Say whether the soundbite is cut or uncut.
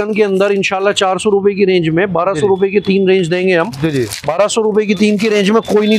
uncut